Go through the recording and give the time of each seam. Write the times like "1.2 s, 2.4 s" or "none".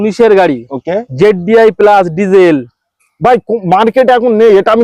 none